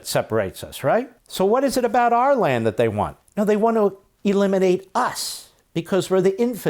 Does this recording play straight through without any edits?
no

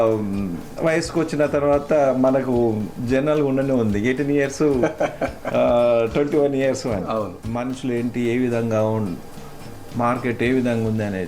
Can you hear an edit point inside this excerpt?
yes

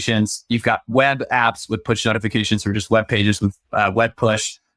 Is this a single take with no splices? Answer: yes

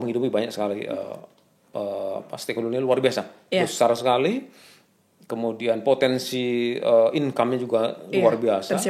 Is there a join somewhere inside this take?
no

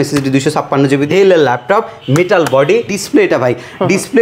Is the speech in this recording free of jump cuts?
no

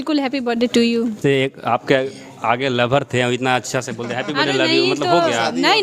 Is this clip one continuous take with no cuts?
no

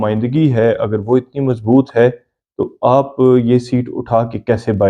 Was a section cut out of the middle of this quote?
no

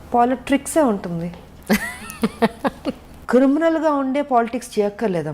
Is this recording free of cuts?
no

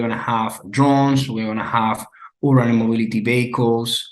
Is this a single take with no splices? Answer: yes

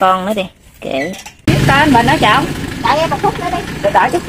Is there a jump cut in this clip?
yes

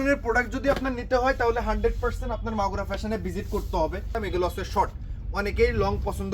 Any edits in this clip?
yes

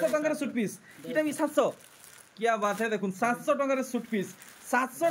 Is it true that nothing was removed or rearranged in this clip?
yes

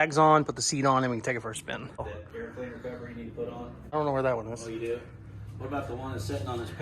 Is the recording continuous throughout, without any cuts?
no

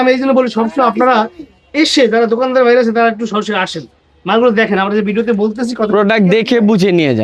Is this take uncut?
yes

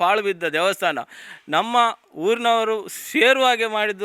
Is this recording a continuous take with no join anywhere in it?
yes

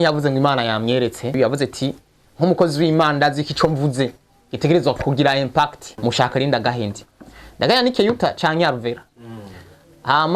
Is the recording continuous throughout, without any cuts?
no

